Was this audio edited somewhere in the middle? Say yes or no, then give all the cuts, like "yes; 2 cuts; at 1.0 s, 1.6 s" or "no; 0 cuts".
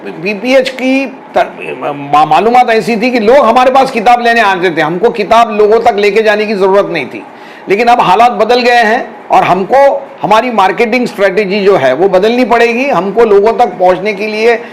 yes; 1 cut; at 1.2 s